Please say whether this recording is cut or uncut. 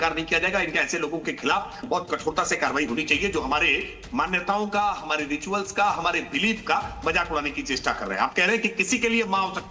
uncut